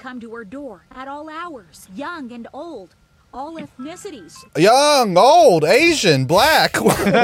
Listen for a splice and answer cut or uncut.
cut